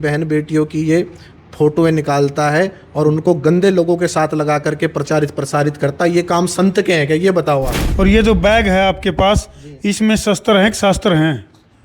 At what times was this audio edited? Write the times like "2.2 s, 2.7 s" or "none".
7.8 s